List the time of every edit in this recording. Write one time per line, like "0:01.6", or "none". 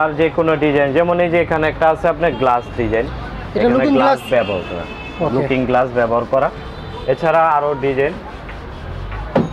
none